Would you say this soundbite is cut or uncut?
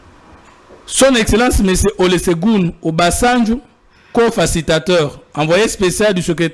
uncut